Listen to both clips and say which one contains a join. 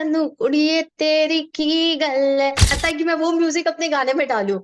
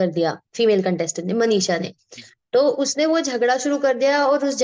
first; 1 cut; at 2.7 s

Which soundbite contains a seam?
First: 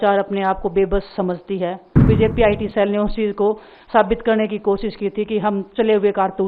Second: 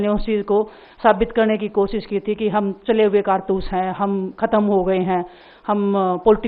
first; 1 cut; at 2.0 s

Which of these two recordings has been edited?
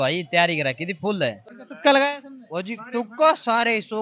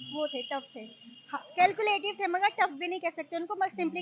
first; 1 cut; at 1.5 s

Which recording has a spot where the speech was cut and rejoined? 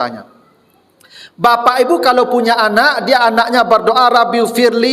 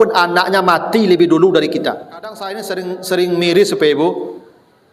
second; 1 cut; at 2.6 s

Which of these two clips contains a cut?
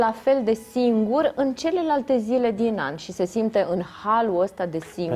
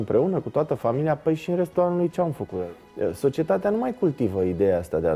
second; 1 cut; at 2.6 s

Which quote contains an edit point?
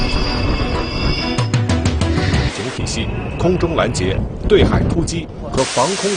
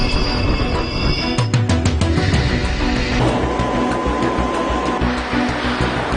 second; 1 cut; at 2.5 s

